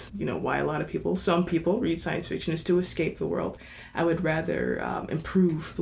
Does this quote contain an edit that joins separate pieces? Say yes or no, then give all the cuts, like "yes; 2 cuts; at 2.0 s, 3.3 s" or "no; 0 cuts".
no; 0 cuts